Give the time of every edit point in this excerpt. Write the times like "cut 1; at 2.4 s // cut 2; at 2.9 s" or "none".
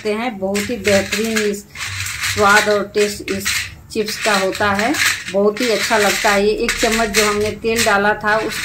none